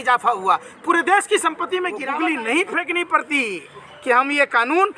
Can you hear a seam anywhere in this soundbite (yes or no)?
yes